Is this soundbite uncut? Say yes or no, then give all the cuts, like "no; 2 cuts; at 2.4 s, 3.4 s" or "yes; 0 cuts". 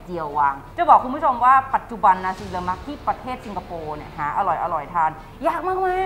yes; 0 cuts